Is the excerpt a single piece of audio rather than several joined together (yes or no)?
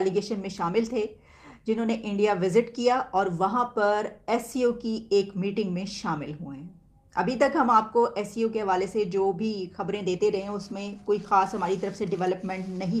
yes